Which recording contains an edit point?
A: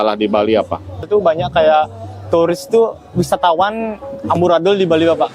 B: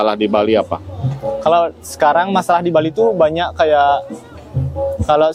A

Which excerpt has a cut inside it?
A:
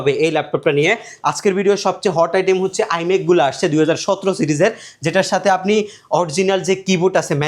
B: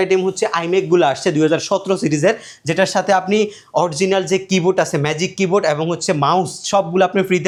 A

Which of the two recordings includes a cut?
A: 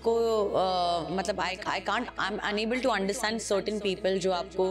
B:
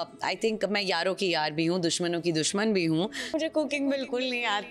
B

